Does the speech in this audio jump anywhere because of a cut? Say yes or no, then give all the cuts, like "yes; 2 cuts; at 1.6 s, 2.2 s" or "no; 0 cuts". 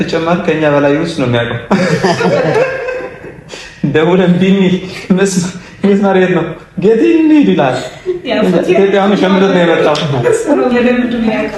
yes; 1 cut; at 10.2 s